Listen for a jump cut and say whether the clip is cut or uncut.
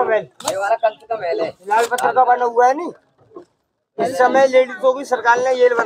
uncut